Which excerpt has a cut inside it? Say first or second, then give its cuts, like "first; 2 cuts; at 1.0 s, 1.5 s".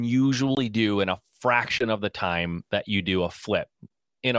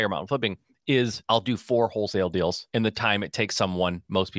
second; 2 cuts; at 1.2 s, 2.6 s